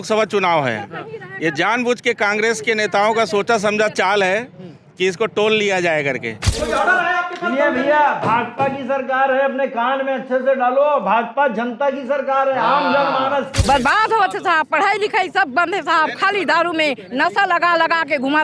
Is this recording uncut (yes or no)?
no